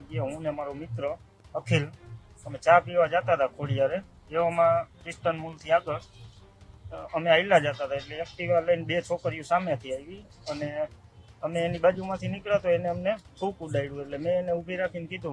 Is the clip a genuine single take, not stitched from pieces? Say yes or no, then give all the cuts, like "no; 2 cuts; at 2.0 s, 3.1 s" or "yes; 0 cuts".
yes; 0 cuts